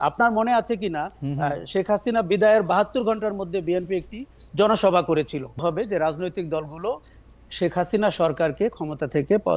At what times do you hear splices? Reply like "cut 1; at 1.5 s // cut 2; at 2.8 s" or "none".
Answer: cut 1; at 5.6 s